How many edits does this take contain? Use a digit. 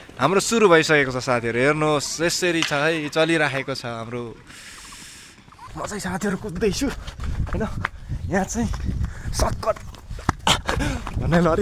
1